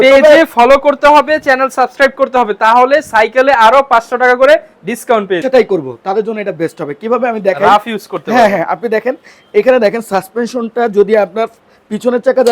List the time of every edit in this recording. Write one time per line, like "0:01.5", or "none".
0:05.4